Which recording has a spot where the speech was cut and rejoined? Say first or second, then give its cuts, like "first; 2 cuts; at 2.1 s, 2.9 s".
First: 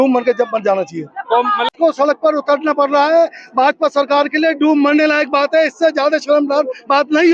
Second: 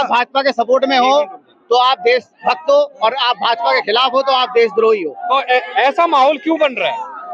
first; 1 cut; at 1.7 s